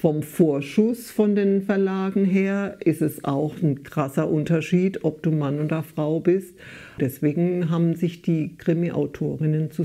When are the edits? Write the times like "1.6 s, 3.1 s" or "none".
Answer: 7.0 s